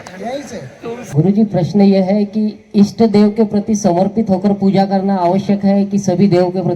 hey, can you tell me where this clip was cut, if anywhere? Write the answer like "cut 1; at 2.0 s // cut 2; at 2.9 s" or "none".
cut 1; at 1.0 s